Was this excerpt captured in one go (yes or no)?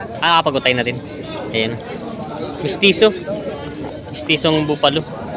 yes